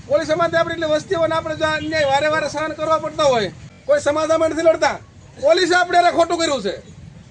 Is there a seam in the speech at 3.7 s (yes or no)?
yes